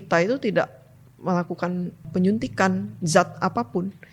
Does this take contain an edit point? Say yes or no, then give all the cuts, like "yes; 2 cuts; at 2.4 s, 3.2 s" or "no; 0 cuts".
yes; 1 cut; at 2.1 s